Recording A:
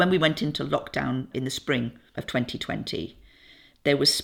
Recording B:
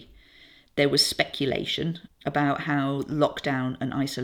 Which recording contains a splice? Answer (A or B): B